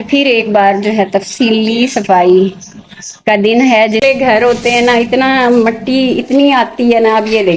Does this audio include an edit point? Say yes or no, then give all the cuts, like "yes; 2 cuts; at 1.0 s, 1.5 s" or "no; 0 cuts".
yes; 1 cut; at 4.0 s